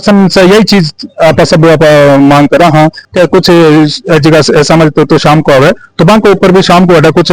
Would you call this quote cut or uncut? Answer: cut